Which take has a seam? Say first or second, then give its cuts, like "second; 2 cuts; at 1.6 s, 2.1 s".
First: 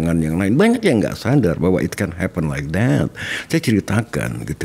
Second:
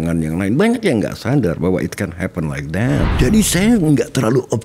second; 1 cut; at 3.1 s